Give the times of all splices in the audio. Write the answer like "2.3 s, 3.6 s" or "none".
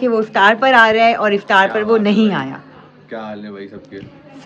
none